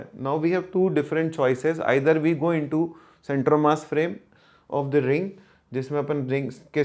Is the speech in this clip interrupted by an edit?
no; 0 cuts

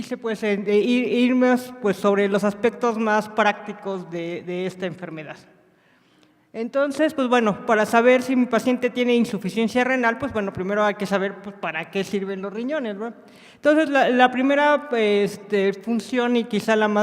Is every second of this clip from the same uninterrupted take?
no; 1 cut; at 15.4 s

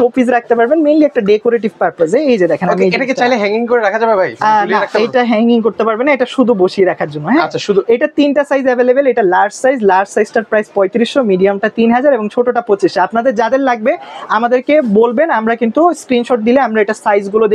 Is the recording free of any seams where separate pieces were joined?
yes; 0 cuts

